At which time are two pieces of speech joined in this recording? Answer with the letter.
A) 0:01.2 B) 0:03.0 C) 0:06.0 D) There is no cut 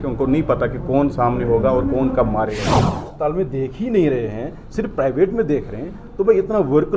B